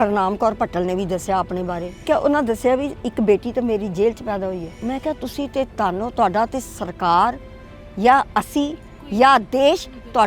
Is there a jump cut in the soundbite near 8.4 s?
no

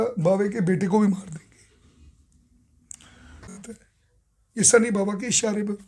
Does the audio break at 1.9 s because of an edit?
no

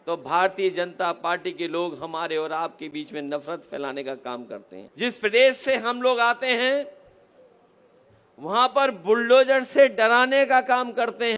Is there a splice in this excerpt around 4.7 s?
yes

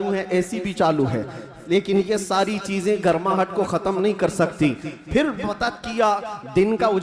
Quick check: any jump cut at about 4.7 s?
no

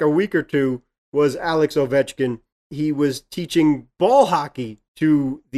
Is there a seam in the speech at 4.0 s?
no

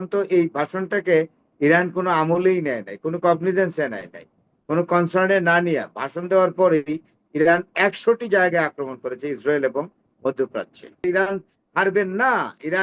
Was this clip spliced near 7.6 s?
no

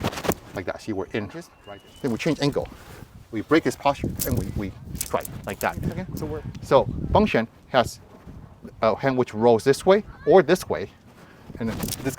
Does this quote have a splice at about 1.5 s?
yes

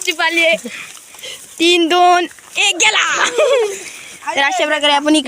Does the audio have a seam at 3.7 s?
yes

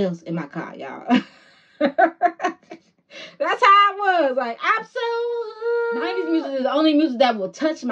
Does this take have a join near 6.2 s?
yes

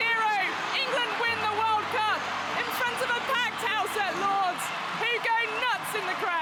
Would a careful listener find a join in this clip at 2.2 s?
no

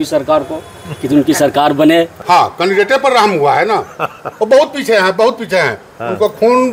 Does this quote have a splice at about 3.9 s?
no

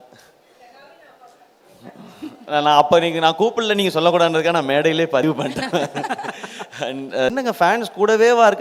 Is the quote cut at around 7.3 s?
yes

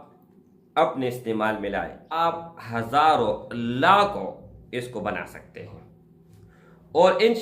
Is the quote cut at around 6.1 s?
no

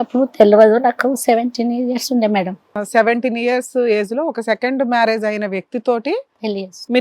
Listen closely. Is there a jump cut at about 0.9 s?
no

